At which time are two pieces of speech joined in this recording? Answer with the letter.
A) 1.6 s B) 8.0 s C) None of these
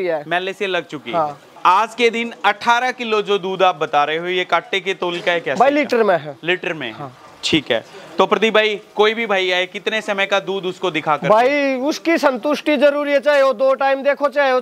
A